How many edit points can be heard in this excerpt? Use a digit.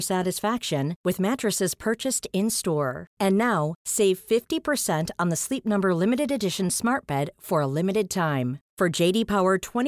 0